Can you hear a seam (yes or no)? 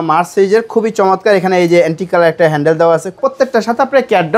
yes